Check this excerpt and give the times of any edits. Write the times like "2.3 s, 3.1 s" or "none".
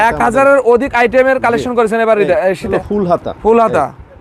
2.7 s